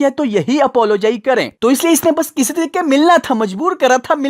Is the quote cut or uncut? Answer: uncut